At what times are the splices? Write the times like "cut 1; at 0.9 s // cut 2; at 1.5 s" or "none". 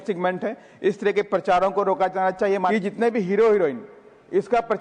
cut 1; at 2.7 s